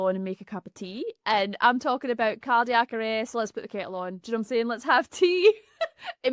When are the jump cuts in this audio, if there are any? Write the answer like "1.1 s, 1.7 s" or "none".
none